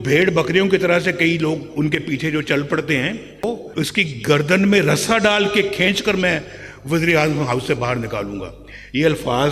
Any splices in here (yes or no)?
yes